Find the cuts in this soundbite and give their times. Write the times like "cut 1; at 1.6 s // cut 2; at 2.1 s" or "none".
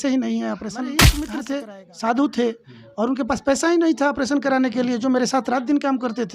cut 1; at 1.3 s